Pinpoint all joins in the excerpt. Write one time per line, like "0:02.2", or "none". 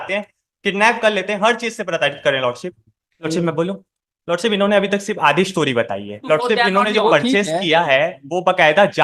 0:03.3
0:06.2